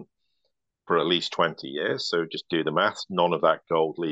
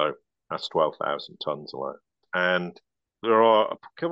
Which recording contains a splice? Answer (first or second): second